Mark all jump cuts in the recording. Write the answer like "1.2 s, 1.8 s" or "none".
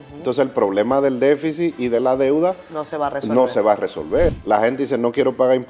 4.3 s